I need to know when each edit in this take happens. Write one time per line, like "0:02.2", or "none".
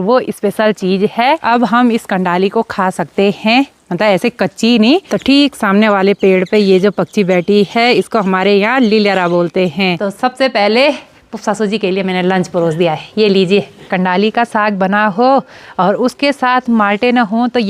0:01.4
0:05.1
0:10.0
0:13.9